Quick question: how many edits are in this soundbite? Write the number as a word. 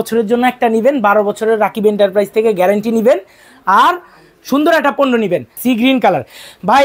one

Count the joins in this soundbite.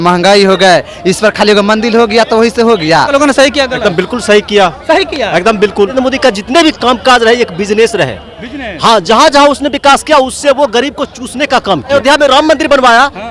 three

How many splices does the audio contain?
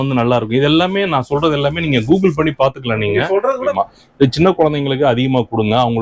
one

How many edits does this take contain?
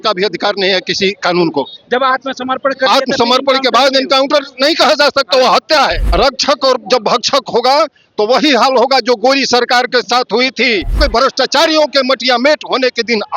two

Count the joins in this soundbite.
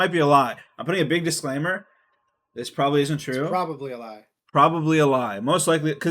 zero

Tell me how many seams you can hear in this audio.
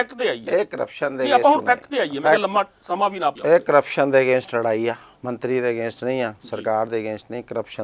two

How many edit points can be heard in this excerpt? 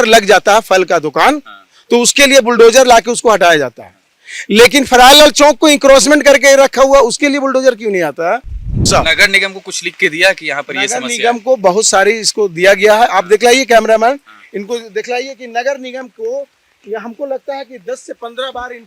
one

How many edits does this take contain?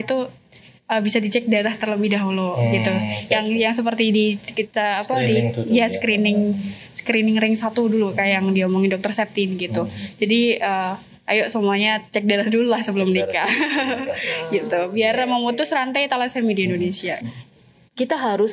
one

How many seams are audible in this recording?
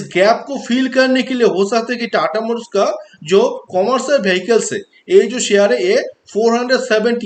zero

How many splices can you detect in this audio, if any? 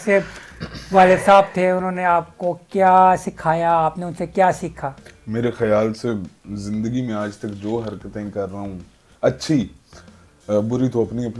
zero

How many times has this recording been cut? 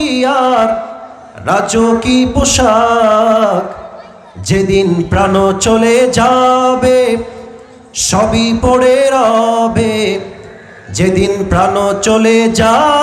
zero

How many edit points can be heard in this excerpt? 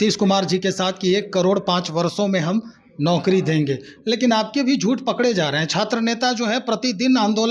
zero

